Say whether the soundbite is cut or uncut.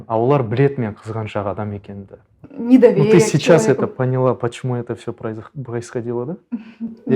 cut